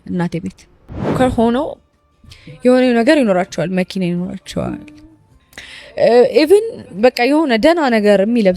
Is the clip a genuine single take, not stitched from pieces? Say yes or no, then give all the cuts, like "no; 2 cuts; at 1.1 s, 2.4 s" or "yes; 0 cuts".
no; 1 cut; at 1.1 s